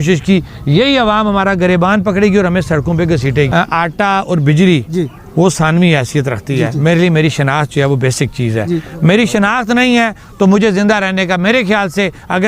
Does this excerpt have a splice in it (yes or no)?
yes